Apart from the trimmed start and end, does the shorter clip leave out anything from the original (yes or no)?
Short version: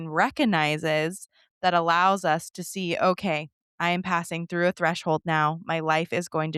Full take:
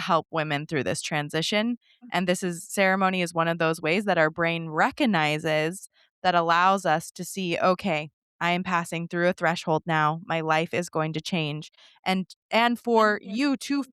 no